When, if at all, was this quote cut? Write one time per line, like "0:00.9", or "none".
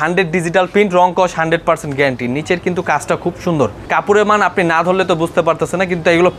0:03.8